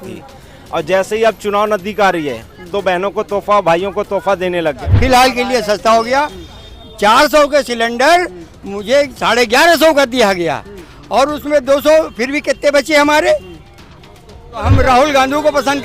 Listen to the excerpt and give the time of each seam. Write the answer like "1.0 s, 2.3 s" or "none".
4.9 s, 14.6 s